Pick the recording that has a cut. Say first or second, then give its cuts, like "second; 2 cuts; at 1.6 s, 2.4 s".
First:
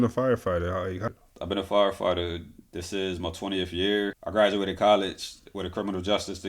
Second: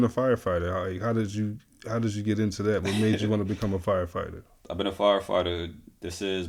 first; 2 cuts; at 1.0 s, 4.2 s